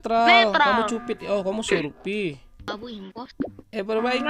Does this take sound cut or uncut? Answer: cut